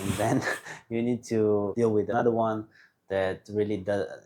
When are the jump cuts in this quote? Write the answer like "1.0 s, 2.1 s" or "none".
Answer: 2.0 s